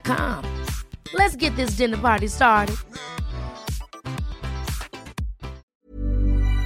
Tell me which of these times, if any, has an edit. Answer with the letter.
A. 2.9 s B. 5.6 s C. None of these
B